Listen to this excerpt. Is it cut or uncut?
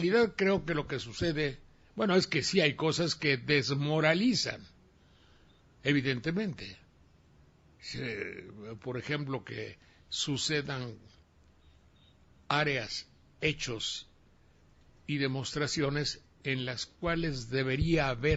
uncut